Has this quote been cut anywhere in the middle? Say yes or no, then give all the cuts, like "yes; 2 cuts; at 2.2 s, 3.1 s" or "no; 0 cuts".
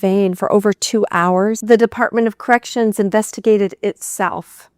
yes; 1 cut; at 1.6 s